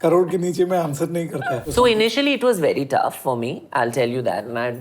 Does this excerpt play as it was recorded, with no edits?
no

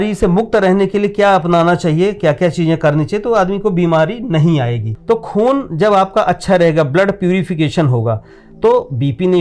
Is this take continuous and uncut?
no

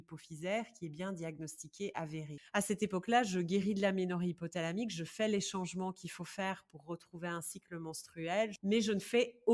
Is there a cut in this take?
yes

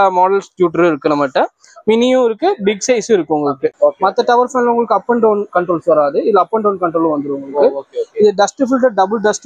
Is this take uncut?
no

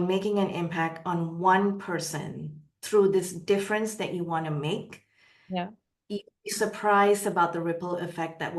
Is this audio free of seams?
yes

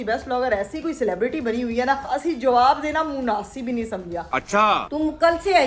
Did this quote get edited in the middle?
yes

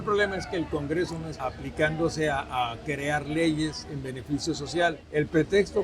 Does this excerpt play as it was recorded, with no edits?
no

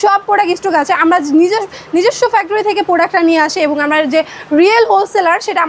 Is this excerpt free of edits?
yes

